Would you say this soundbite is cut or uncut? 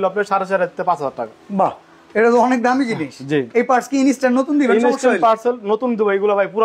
uncut